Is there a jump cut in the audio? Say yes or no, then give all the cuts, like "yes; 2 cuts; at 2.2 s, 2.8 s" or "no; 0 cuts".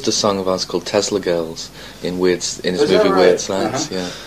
yes; 1 cut; at 1.9 s